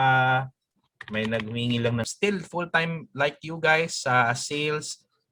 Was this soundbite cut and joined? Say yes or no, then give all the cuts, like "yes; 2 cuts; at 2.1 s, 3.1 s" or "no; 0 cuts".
yes; 1 cut; at 2.0 s